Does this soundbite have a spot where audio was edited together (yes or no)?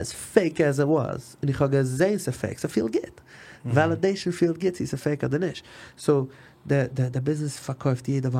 no